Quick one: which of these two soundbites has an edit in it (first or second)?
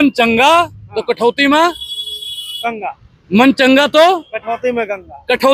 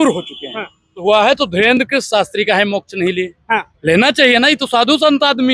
second